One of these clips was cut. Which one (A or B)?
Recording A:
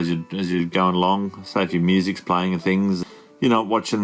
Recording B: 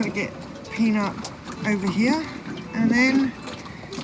A